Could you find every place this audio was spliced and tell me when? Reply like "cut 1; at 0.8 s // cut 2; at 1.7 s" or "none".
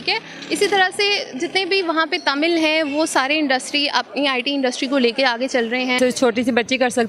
cut 1; at 6.0 s